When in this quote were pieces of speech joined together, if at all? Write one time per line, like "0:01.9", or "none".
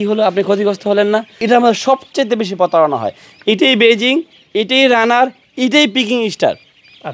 0:01.3